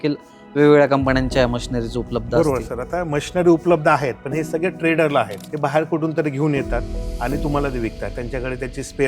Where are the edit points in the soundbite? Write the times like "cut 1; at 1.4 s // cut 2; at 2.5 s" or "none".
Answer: cut 1; at 5.4 s

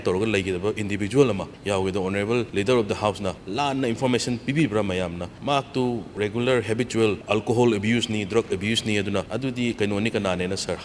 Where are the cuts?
cut 1; at 1.5 s // cut 2; at 2.5 s // cut 3; at 3.4 s // cut 4; at 5.3 s // cut 5; at 6.1 s // cut 6; at 7.2 s // cut 7; at 9.3 s

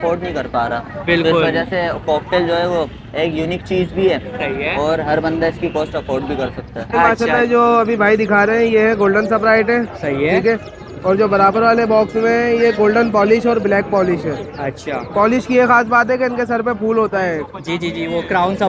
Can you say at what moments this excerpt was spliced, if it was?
cut 1; at 7.1 s

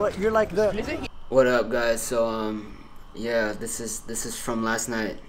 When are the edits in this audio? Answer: cut 1; at 1.0 s

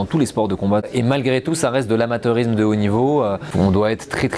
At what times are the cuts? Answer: cut 1; at 0.8 s // cut 2; at 3.4 s

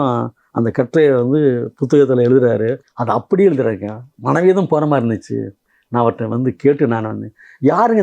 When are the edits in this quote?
cut 1; at 2.9 s

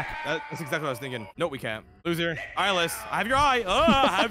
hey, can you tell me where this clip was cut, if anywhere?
cut 1; at 1.9 s

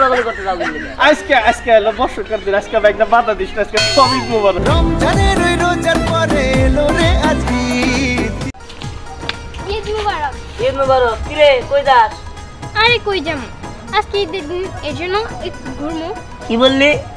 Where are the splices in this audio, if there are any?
cut 1; at 8.5 s

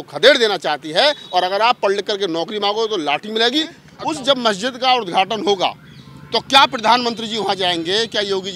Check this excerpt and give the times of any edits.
cut 1; at 3.9 s

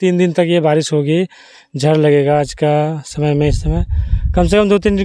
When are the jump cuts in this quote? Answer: none

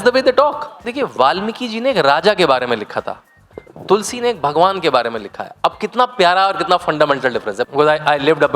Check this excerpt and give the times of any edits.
cut 1; at 0.8 s // cut 2; at 7.7 s

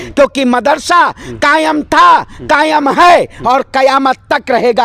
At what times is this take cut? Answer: none

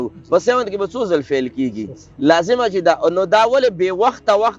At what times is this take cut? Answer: none

